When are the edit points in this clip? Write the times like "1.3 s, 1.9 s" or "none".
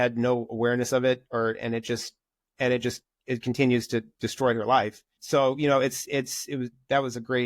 5.1 s